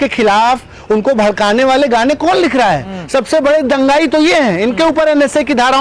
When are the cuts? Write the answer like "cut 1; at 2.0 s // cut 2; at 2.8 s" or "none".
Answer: none